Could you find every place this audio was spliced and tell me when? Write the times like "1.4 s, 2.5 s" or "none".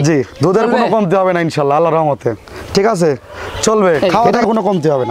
4.0 s